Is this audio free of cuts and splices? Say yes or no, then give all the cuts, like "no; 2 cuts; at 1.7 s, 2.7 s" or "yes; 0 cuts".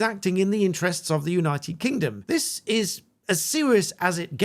no; 1 cut; at 2.2 s